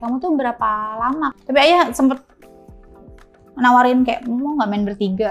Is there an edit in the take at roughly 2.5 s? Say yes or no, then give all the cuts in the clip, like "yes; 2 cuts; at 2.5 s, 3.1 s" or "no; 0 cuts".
no; 1 cut; at 1.3 s